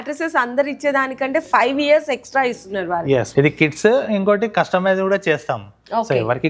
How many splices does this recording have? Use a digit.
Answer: 1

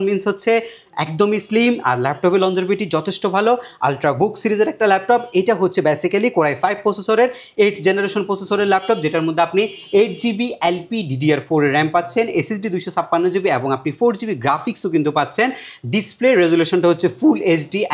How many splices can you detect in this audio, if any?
0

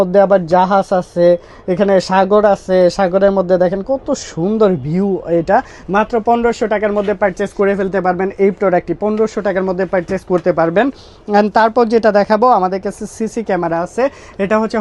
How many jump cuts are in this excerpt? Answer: 0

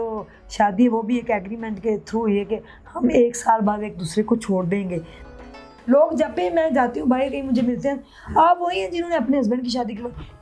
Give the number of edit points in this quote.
1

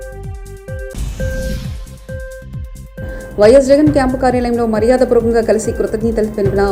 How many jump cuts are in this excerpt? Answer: 0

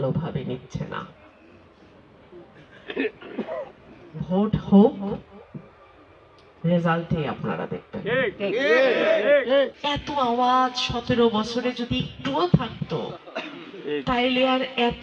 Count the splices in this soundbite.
1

